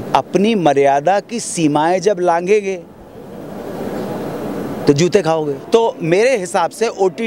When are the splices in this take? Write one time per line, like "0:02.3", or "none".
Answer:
0:05.6